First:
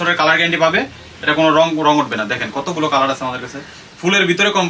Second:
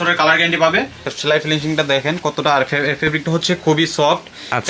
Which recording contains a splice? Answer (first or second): second